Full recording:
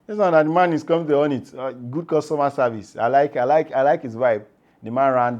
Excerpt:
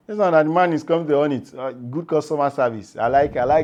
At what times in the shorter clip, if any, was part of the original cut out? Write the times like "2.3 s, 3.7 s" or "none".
none